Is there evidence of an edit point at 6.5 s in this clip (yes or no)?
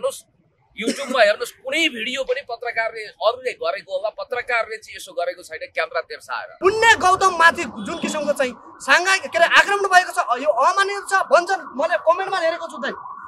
yes